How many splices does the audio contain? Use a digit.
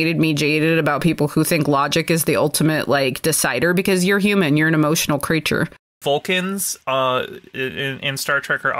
1